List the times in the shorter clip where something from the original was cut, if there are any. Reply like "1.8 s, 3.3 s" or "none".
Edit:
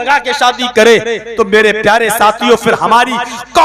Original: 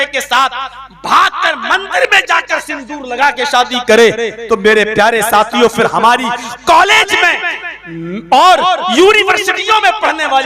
none